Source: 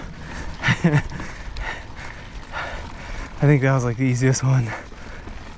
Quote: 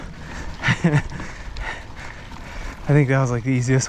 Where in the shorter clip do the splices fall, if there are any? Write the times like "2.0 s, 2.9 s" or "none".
2.3 s